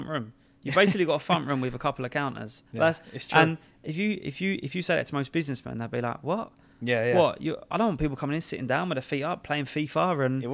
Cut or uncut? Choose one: uncut